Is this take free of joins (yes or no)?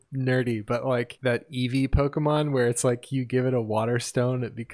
no